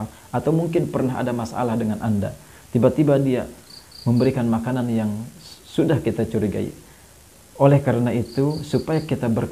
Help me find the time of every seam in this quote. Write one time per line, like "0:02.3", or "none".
none

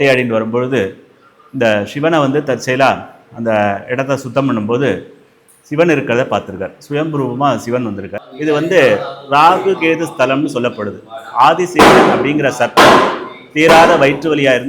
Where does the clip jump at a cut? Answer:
0:08.2

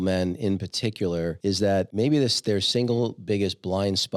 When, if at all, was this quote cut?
0:01.7

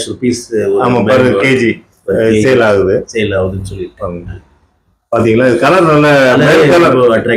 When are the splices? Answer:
none

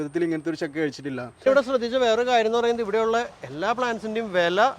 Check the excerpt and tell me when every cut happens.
0:01.4

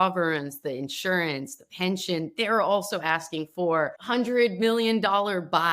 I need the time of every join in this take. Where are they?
0:04.0

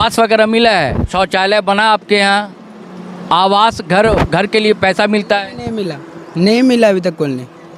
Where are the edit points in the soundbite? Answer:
0:01.1

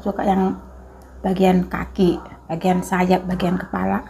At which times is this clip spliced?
none

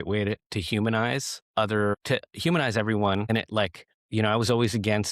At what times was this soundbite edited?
0:01.4
0:02.0
0:03.4

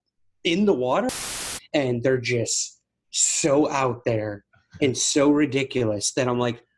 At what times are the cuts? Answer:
0:01.1

